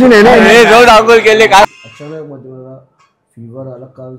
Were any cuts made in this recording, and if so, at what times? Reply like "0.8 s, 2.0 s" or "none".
1.6 s